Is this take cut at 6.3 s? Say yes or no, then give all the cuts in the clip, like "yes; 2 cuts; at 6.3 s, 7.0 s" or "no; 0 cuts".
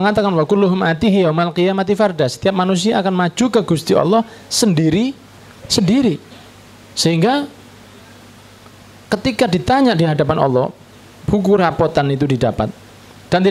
no; 0 cuts